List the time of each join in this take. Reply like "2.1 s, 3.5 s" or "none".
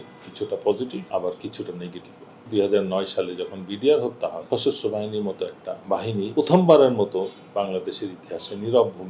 1.1 s, 2.5 s, 4.4 s, 6.1 s